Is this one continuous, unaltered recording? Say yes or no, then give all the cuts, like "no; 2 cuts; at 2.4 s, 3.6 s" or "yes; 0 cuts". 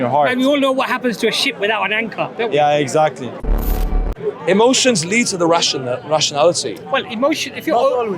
no; 1 cut; at 3.7 s